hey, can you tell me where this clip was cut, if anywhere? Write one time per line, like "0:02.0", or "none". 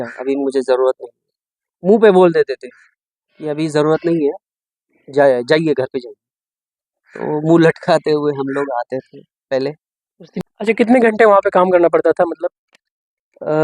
0:10.3